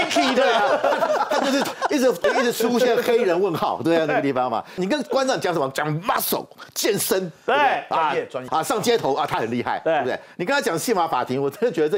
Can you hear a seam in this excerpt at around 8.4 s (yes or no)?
yes